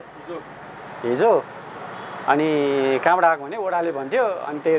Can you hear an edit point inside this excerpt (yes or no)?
no